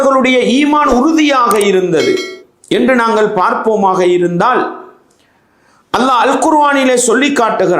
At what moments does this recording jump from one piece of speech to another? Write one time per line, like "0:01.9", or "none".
none